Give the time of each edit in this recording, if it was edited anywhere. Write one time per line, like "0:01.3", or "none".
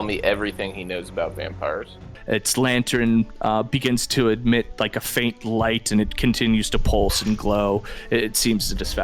0:02.1